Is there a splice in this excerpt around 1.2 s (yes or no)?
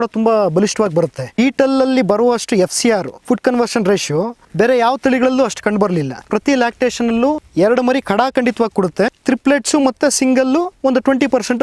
yes